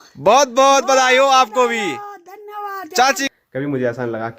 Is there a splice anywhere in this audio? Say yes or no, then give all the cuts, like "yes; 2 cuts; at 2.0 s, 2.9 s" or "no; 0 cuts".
yes; 1 cut; at 3.3 s